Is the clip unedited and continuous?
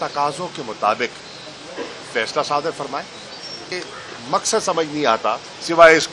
no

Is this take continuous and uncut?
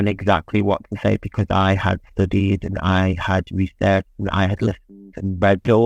yes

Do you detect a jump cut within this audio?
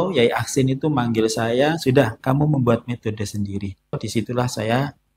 yes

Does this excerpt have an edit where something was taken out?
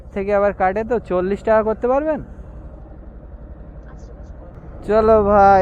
yes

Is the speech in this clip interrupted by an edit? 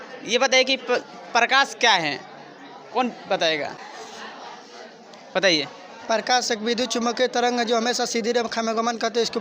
yes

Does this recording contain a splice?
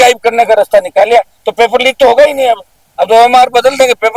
no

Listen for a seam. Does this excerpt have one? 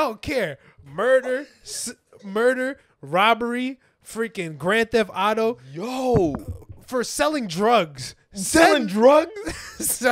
no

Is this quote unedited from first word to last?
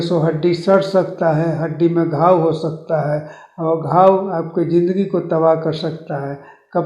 yes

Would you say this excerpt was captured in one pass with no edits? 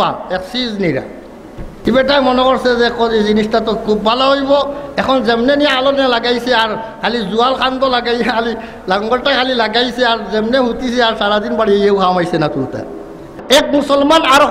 no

